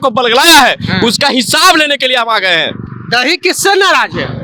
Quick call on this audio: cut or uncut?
uncut